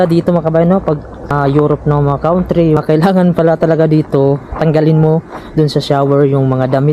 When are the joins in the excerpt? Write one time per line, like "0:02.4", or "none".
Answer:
0:01.3
0:02.8

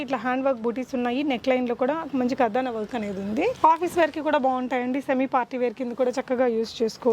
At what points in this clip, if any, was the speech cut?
0:03.6

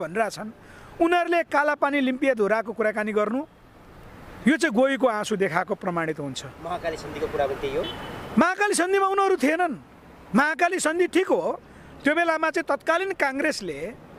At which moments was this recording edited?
none

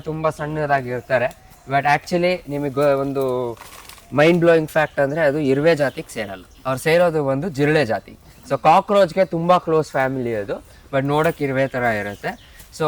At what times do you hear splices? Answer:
none

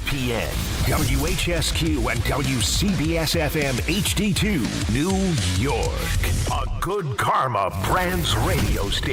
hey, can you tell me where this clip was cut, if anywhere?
none

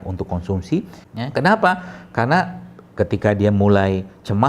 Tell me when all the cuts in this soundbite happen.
0:01.0

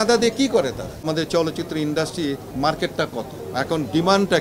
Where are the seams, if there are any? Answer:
0:01.1
0:02.5
0:03.4

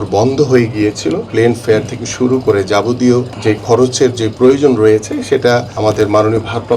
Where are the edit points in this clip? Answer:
0:01.3

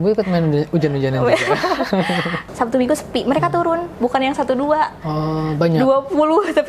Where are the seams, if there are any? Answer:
0:02.4

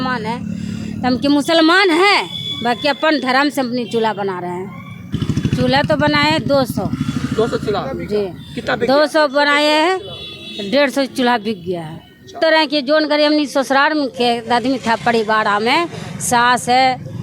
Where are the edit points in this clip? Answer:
0:05.1
0:12.4

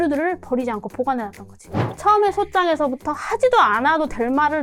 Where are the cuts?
0:01.8

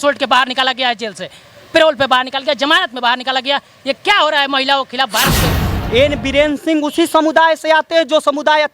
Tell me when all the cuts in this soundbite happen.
0:05.7

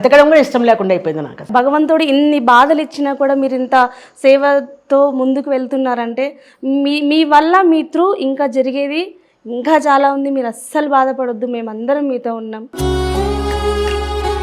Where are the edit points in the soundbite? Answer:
0:01.4

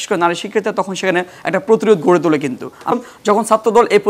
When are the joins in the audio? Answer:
0:02.9

